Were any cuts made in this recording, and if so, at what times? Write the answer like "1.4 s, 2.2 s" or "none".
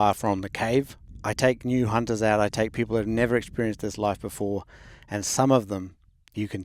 1.0 s